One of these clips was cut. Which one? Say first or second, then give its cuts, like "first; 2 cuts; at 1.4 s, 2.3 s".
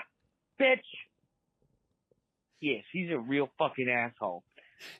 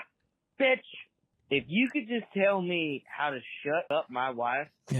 second; 2 cuts; at 1.3 s, 3.9 s